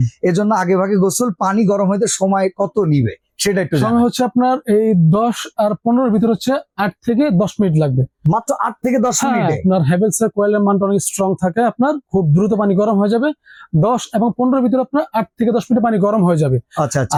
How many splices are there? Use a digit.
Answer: 0